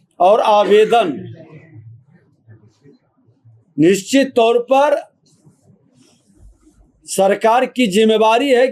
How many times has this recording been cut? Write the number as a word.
zero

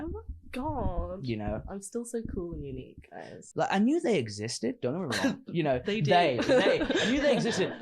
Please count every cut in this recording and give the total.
one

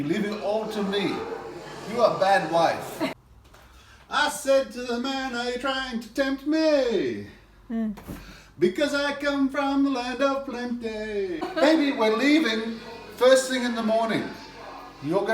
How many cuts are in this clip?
two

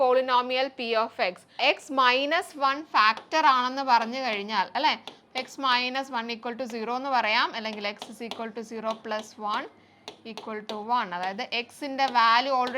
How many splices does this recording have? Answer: one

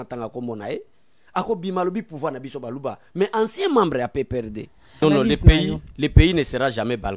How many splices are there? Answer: one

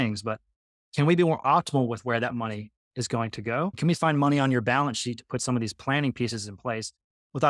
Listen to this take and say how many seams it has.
one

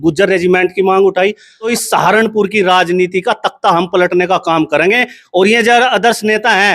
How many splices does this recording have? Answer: one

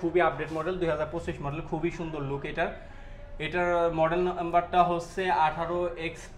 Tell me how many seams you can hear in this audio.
zero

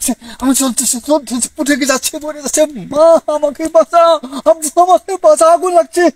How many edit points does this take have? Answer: zero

